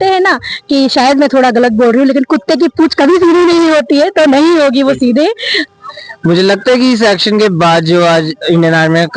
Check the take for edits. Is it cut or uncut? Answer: cut